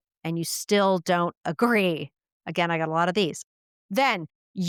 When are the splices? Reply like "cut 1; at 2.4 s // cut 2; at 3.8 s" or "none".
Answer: none